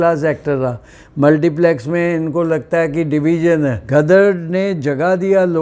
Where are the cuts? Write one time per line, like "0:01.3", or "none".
0:03.8